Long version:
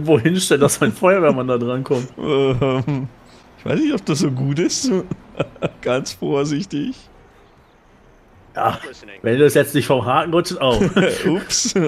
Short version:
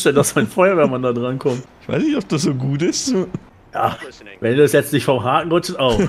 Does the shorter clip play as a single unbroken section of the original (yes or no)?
no